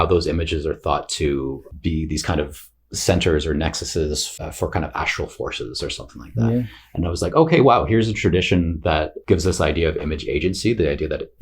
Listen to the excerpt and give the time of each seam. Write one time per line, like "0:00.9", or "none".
0:01.7
0:04.3
0:09.2